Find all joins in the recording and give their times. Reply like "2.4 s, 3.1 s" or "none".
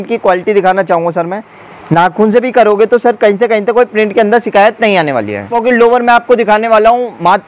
5.5 s